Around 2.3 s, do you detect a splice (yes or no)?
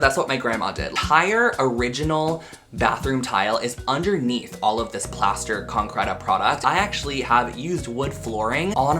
no